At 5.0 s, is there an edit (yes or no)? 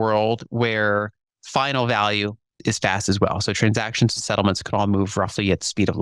no